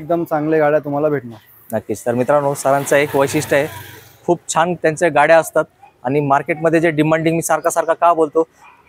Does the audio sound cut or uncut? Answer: uncut